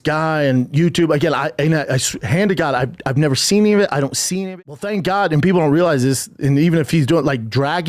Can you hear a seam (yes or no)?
yes